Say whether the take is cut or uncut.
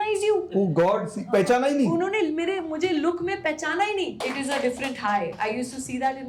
cut